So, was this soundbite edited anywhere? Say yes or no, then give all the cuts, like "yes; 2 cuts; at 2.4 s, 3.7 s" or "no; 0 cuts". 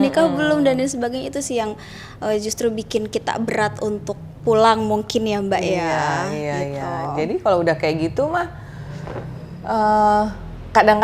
no; 0 cuts